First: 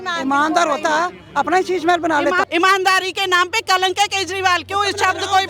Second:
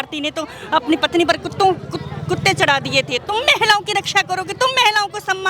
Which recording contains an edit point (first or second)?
first